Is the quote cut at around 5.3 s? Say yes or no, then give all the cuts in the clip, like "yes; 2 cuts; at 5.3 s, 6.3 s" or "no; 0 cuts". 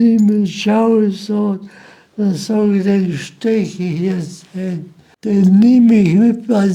yes; 1 cut; at 5.3 s